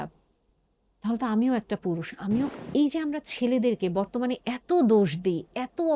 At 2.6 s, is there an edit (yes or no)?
yes